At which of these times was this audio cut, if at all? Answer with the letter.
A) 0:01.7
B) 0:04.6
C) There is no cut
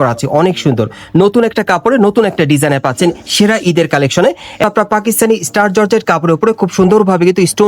B